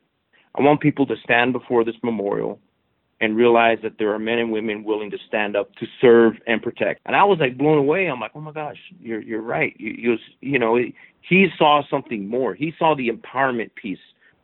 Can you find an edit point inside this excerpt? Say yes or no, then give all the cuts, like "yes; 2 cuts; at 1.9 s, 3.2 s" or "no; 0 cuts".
yes; 1 cut; at 7.0 s